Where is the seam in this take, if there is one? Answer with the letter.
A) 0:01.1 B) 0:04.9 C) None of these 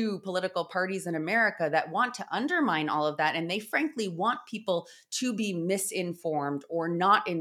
C